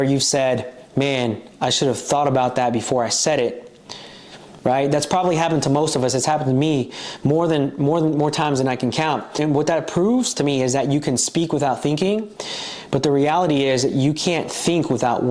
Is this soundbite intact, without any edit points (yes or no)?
no